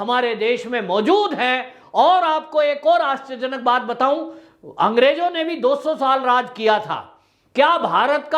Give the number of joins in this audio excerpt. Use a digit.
0